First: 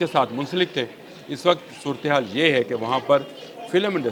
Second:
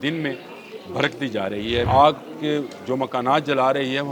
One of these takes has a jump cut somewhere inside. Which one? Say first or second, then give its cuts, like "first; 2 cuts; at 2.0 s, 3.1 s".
second; 1 cut; at 1.9 s